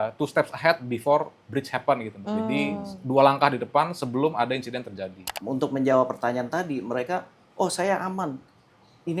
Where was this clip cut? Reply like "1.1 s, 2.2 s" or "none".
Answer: 5.3 s